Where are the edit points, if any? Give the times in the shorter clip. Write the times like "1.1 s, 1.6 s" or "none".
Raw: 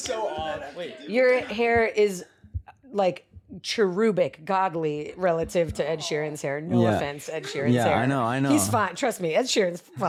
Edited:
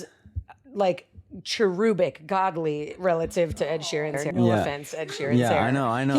4.2 s